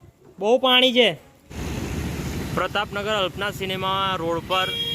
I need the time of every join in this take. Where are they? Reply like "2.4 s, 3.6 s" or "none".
1.5 s